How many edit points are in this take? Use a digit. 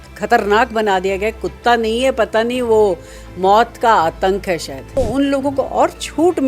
1